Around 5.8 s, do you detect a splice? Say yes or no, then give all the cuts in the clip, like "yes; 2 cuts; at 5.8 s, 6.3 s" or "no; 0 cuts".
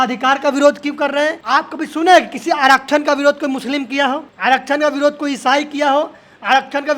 no; 2 cuts; at 1.4 s, 4.3 s